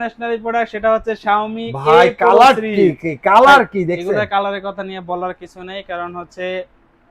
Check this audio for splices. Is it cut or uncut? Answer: uncut